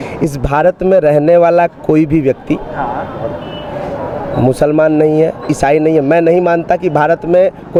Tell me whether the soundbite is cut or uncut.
uncut